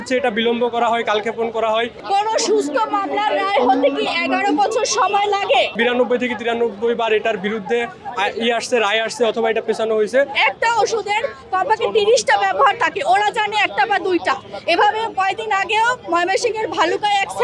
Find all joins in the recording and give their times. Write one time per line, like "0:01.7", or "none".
0:02.0
0:05.8
0:10.3